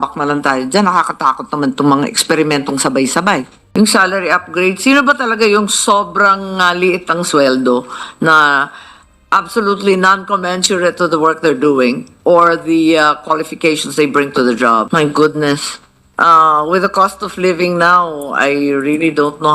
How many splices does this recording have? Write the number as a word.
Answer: two